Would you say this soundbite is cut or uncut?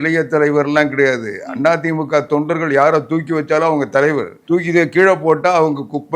cut